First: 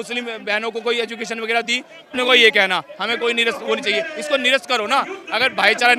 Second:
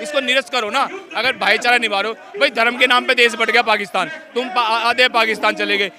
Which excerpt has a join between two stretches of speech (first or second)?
first